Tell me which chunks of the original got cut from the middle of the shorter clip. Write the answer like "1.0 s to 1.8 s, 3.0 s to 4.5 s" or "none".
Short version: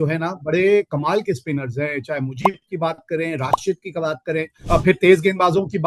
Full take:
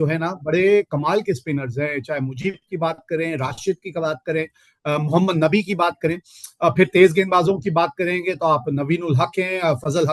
4.5 s to 6.5 s